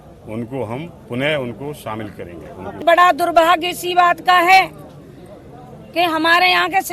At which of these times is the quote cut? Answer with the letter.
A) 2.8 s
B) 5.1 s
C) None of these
A